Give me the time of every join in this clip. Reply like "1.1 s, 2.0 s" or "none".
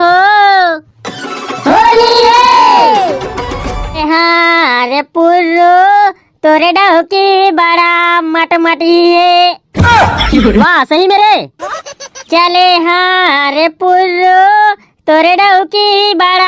4.0 s